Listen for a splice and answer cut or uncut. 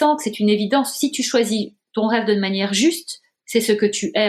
uncut